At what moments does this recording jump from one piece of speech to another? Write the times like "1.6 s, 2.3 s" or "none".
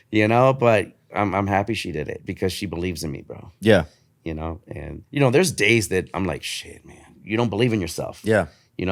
2.2 s, 7.2 s

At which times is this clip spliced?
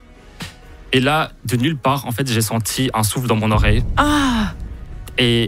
none

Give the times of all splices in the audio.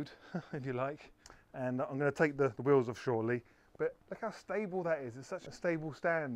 5.4 s

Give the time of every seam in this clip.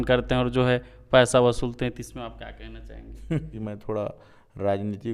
3.5 s

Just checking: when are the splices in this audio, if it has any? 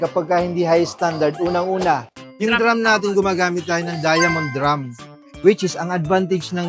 2.1 s

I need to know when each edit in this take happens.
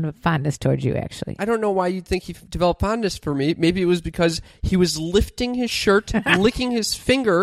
1.4 s

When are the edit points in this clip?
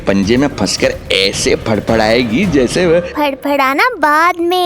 none

